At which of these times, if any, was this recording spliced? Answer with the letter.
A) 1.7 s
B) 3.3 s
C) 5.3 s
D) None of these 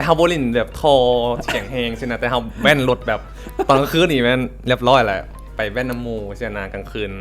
D